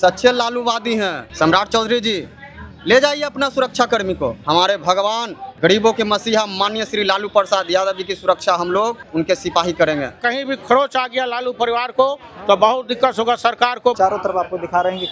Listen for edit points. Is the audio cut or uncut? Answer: cut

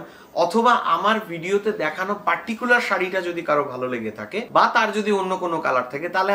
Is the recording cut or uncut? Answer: uncut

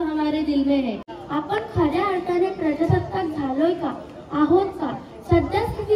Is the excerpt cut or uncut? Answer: cut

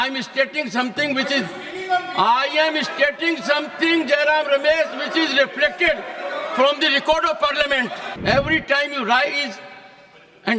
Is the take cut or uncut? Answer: cut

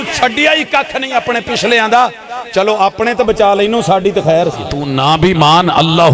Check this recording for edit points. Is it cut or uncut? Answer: cut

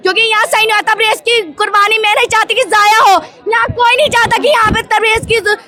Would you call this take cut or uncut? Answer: uncut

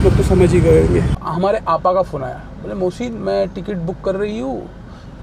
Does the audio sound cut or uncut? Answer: cut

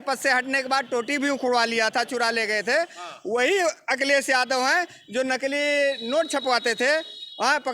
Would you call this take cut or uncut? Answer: uncut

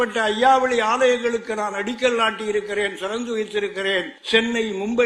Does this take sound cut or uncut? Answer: cut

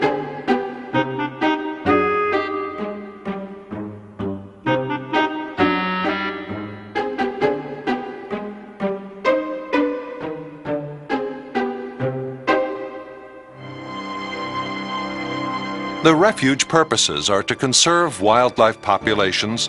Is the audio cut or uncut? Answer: uncut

